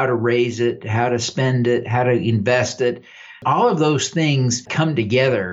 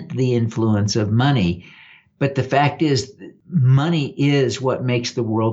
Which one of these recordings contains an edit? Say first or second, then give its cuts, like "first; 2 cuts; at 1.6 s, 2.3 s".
first; 2 cuts; at 3.4 s, 4.6 s